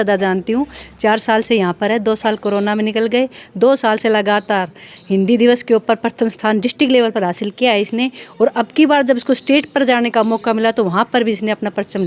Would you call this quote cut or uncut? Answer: uncut